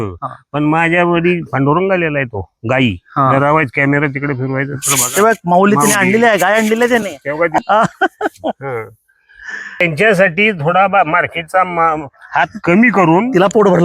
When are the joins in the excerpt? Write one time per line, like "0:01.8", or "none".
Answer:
0:07.6
0:09.8

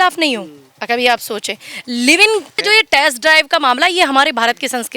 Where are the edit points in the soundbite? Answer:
0:02.5

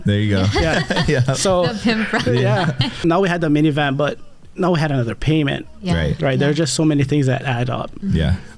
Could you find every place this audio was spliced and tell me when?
0:02.9

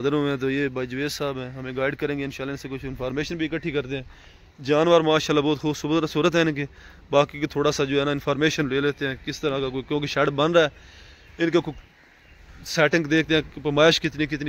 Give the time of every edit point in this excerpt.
none

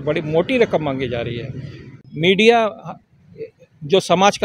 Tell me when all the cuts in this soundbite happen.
0:02.0

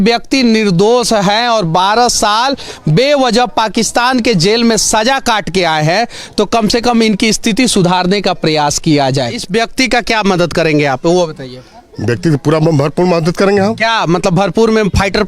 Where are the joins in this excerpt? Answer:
0:09.4

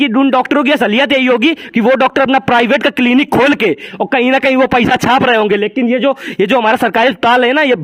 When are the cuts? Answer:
none

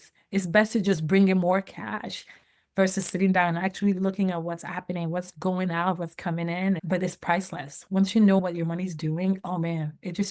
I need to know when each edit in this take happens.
0:06.8
0:08.4

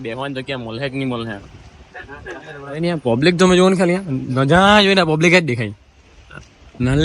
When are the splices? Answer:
none

